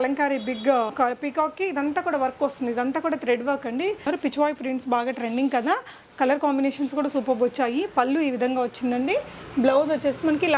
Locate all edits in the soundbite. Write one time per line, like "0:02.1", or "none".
0:04.1